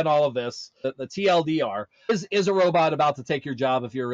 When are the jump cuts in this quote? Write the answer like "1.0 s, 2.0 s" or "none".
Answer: 0.8 s, 1.9 s